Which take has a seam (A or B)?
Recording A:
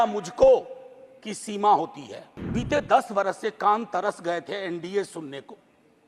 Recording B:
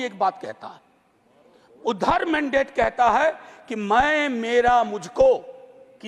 A